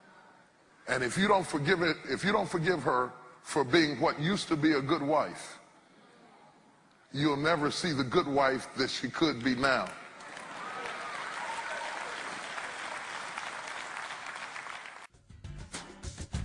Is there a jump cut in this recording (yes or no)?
yes